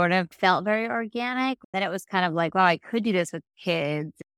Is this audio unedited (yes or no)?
no